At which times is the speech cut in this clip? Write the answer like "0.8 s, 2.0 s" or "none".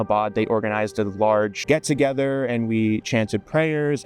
none